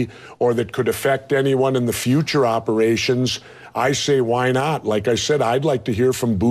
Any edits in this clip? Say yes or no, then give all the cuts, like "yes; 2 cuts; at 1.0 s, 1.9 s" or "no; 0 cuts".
yes; 1 cut; at 5.2 s